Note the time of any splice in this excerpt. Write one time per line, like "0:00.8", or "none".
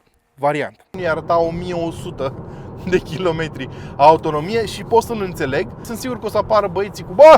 0:00.9
0:05.9